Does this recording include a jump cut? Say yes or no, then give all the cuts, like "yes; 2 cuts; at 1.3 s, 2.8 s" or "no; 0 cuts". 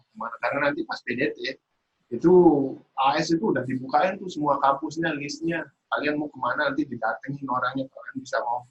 no; 0 cuts